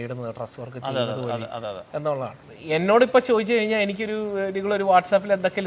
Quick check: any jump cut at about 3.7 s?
no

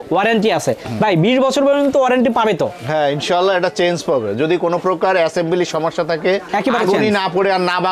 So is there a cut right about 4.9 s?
no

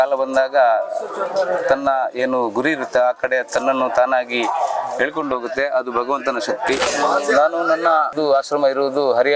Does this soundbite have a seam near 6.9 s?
yes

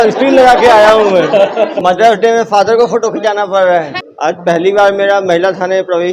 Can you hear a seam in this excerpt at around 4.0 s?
yes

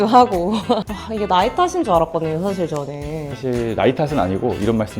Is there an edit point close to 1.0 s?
yes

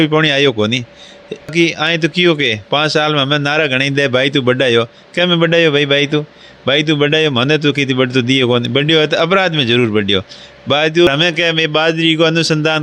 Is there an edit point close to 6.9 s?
no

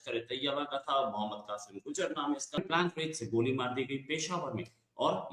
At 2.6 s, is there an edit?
yes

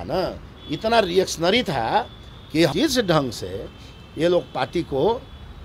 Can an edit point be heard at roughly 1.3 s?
no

